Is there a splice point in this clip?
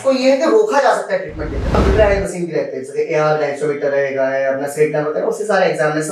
yes; 1 cut; at 1.7 s

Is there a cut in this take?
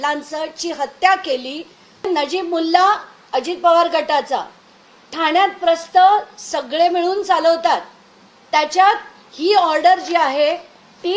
yes; 1 cut; at 2.1 s

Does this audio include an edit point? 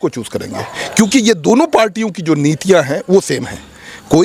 no; 0 cuts

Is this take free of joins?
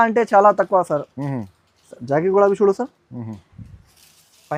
yes; 0 cuts

